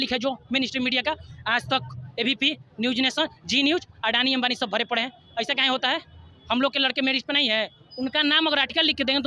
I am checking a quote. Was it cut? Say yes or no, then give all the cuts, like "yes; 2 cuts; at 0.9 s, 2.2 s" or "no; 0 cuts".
no; 0 cuts